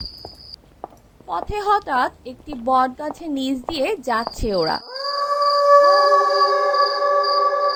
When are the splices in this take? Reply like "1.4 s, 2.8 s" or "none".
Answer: none